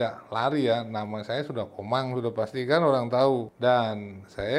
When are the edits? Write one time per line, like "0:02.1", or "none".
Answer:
0:03.5